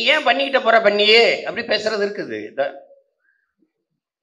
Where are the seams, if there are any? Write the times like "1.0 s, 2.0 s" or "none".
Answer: none